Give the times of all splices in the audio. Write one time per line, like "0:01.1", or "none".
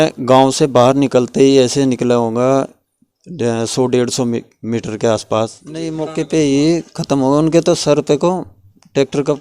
0:06.0